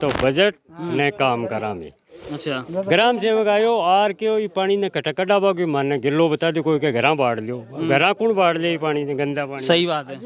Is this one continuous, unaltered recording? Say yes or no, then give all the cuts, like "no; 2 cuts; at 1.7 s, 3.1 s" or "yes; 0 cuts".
yes; 0 cuts